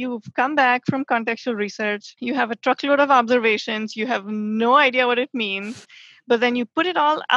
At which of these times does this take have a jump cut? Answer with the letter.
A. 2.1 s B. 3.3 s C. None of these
A